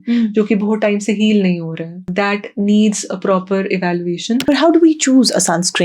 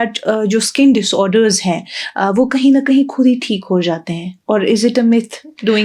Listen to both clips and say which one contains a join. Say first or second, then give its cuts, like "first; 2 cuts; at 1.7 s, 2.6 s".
first; 2 cuts; at 2.0 s, 4.4 s